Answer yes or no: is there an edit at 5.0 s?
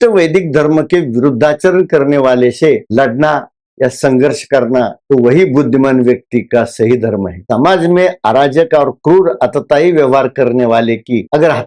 yes